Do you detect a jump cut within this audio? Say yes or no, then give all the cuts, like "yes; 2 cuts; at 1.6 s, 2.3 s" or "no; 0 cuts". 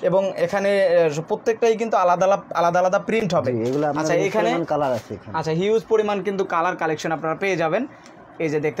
no; 0 cuts